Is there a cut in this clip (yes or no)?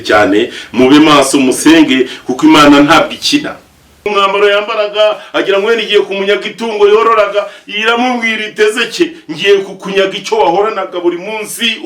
yes